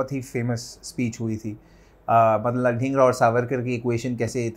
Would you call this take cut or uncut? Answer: uncut